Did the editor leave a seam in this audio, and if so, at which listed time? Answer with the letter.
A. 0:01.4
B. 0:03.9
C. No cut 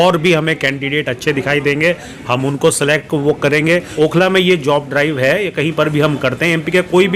B